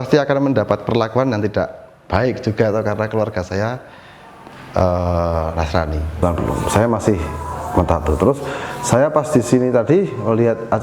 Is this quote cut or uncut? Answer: cut